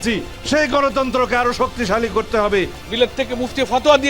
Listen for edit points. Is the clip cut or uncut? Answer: cut